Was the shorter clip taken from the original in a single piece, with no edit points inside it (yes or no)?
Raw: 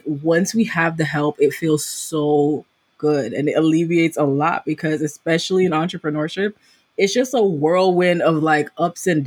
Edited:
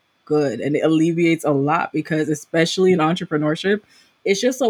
yes